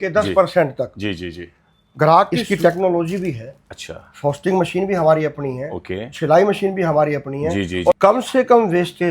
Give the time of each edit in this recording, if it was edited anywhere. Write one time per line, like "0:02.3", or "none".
0:02.4
0:08.0